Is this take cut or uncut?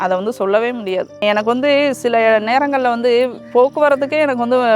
cut